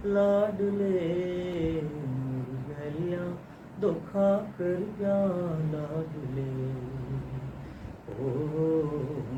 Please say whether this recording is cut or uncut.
uncut